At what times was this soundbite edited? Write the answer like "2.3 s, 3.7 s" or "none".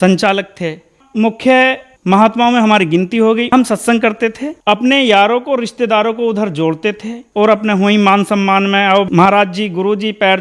1.0 s, 1.9 s, 3.5 s, 4.5 s, 7.2 s